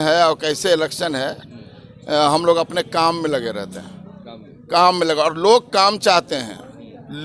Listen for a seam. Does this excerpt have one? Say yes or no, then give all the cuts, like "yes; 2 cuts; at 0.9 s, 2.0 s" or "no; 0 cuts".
no; 0 cuts